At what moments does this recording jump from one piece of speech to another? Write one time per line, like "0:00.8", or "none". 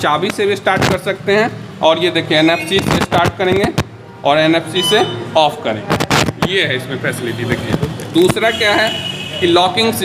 none